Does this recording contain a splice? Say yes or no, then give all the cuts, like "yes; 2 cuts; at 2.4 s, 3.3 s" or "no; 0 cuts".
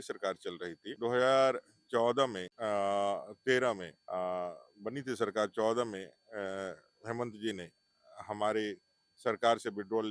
yes; 3 cuts; at 0.9 s, 2.5 s, 3.9 s